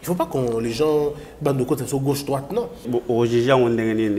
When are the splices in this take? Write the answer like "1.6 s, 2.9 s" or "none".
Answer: 2.9 s